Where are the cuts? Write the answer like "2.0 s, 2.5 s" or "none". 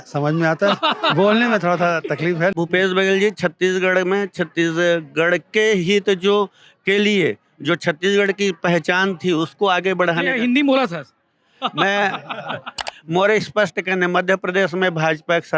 2.5 s, 12.8 s